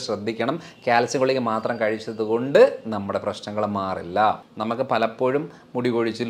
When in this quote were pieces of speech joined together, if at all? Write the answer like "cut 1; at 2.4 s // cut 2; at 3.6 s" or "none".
cut 1; at 4.5 s